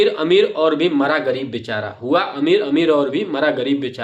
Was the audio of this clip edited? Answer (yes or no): no